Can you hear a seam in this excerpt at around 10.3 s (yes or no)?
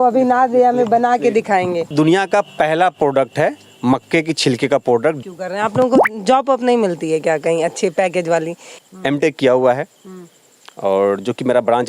no